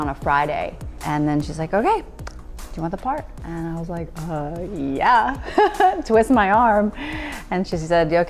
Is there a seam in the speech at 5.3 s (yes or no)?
no